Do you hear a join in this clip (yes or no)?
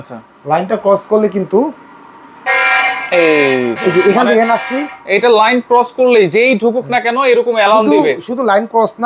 no